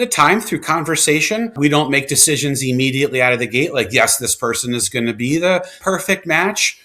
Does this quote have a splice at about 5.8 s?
yes; 2 cuts; at 1.6 s, 5.8 s

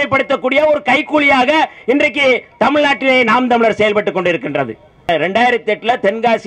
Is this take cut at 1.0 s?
no; 1 cut; at 5.1 s

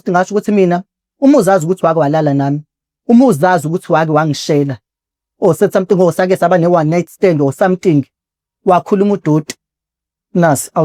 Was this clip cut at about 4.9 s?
no; 0 cuts

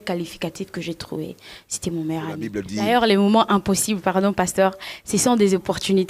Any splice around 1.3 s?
no; 1 cut; at 2.8 s

